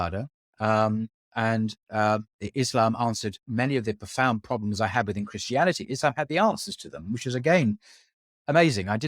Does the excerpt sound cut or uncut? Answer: uncut